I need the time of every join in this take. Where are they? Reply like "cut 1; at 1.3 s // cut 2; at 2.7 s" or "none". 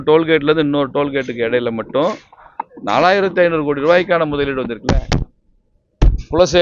none